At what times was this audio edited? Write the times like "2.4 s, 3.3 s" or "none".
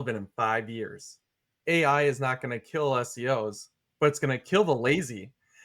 1.2 s